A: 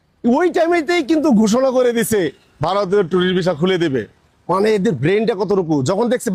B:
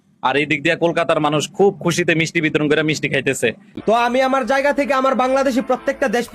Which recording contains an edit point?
B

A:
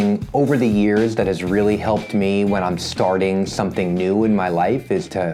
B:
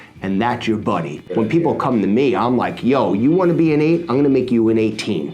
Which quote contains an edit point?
B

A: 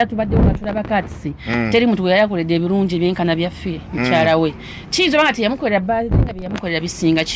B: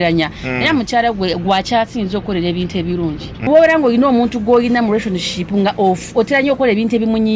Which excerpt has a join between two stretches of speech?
B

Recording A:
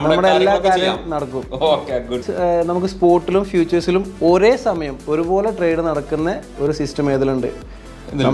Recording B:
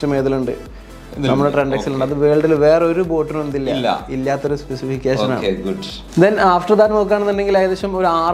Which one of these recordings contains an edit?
A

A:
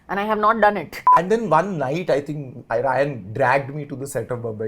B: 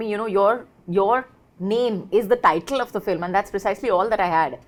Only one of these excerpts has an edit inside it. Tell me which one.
A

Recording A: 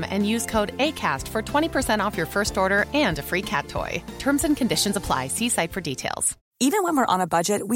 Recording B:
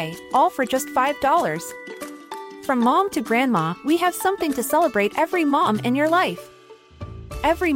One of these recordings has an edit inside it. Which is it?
A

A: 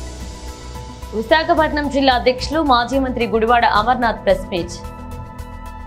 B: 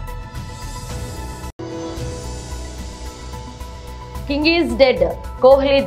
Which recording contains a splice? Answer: A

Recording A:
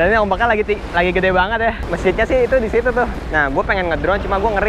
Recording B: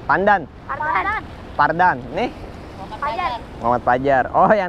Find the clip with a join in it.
A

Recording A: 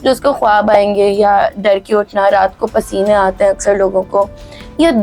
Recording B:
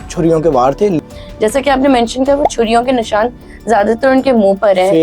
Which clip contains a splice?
B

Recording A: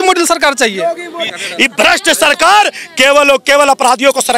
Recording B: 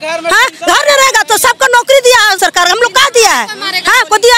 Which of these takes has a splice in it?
A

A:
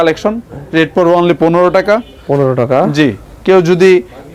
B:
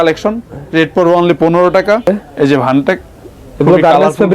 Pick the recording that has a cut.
B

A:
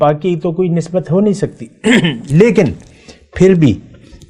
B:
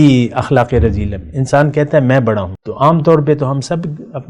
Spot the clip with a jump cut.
B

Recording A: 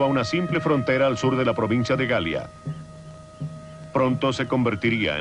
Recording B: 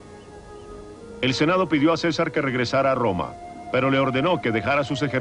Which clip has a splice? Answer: B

